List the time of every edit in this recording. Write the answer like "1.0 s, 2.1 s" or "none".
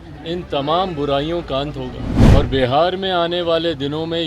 2.1 s